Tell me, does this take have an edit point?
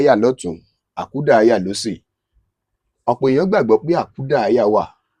no; 0 cuts

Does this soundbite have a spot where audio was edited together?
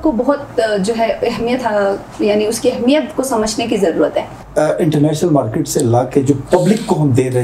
yes; 1 cut; at 4.4 s

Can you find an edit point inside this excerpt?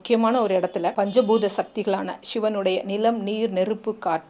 yes; 1 cut; at 0.9 s

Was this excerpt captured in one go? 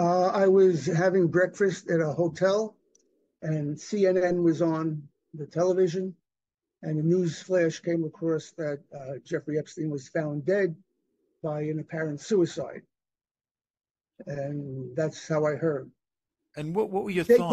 yes; 0 cuts

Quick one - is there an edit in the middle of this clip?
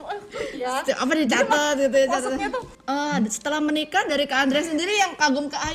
yes; 1 cut; at 2.7 s

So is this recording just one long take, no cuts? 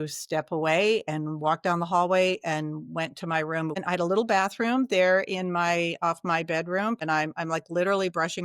no; 2 cuts; at 3.8 s, 7.0 s

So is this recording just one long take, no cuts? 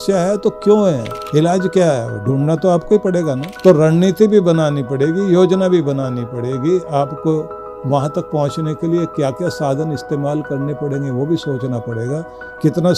no; 2 cuts; at 1.2 s, 3.5 s

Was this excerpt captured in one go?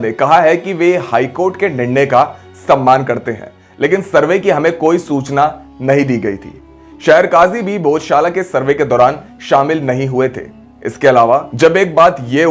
yes; 0 cuts

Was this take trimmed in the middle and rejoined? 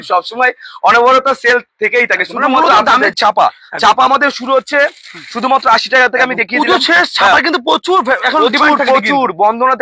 yes; 1 cut; at 3.1 s

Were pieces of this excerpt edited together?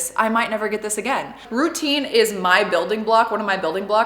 yes; 1 cut; at 1.4 s

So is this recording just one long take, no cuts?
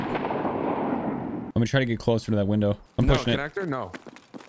no; 2 cuts; at 1.4 s, 2.9 s

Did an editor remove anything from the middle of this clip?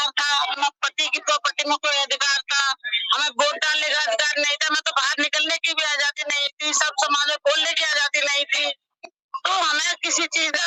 no; 0 cuts

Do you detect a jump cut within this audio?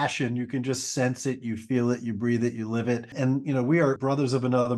no; 0 cuts

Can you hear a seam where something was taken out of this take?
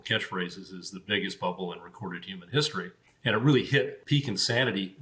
yes; 2 cuts; at 3.0 s, 4.0 s

